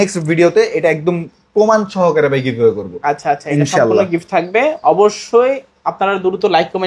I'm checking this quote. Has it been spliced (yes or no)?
no